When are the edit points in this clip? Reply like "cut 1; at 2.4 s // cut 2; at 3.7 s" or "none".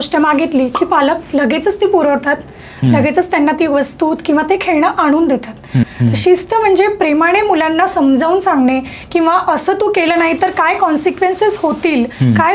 cut 1; at 5.9 s